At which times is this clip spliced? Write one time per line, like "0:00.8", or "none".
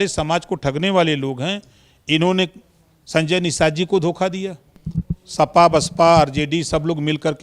0:04.7